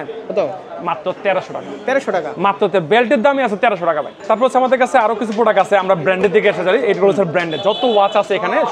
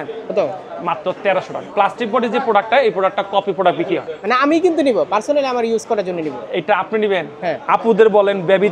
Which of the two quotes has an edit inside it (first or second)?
second